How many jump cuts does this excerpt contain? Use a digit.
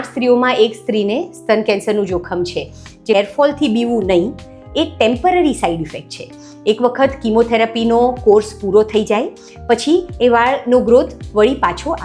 1